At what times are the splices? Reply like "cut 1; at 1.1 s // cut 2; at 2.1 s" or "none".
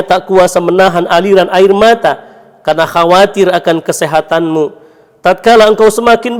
none